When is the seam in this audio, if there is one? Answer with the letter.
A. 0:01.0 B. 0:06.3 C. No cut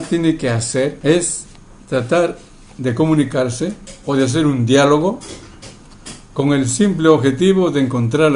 A